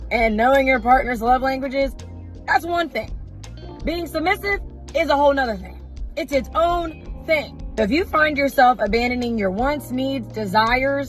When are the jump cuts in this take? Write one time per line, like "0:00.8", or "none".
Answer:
0:07.6